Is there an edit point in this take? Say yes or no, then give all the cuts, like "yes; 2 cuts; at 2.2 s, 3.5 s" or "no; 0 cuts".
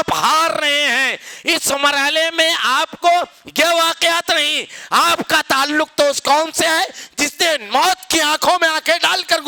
no; 0 cuts